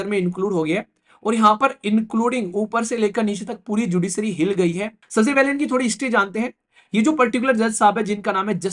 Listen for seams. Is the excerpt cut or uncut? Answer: cut